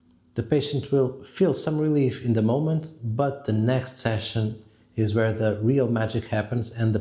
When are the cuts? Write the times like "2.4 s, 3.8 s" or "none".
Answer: none